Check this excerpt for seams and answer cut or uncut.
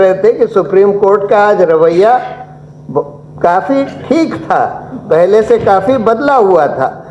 uncut